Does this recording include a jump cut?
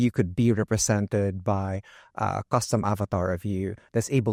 no; 0 cuts

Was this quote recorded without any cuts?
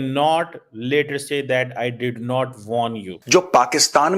no; 1 cut; at 3.1 s

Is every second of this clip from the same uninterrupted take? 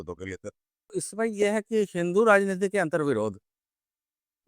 no; 1 cut; at 1.0 s

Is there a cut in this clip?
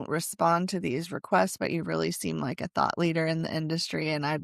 no; 0 cuts

